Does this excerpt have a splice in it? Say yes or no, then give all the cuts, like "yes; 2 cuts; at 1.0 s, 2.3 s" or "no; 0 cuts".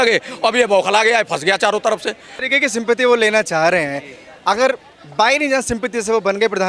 yes; 1 cut; at 2.3 s